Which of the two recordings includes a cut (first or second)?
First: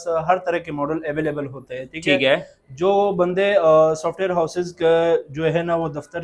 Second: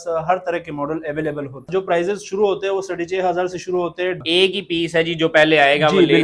second